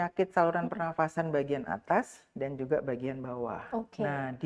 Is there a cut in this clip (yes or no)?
no